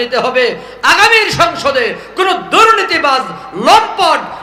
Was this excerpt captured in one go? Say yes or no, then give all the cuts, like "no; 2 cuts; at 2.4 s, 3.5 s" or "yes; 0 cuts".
yes; 0 cuts